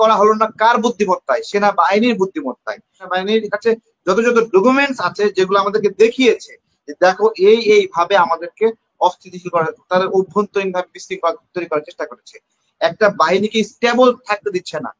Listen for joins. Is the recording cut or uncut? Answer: cut